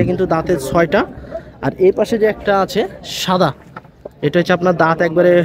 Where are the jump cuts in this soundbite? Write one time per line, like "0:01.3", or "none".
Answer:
none

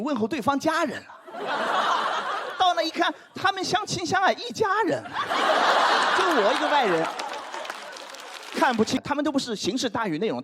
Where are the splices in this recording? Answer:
0:09.0

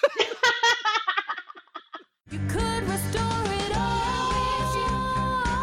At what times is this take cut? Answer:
0:02.3

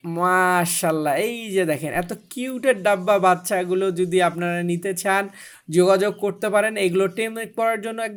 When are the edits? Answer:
none

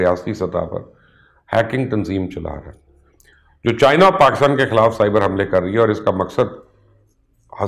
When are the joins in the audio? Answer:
none

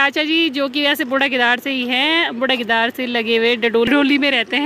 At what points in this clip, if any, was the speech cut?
none

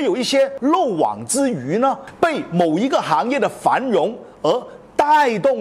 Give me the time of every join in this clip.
none

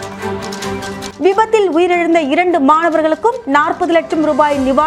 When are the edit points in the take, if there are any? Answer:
0:01.1

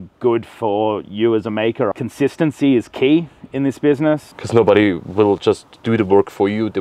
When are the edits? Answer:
0:01.9
0:04.3

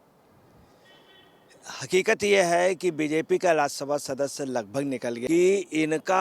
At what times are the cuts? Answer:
0:05.2

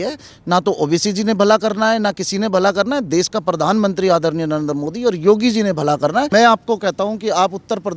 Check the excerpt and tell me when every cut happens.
0:06.3

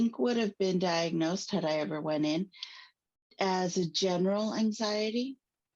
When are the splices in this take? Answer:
none

